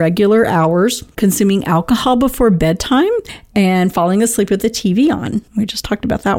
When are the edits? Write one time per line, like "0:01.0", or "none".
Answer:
0:01.0
0:03.4
0:05.5